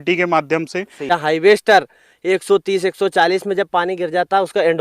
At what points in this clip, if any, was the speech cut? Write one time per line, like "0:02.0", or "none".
0:01.0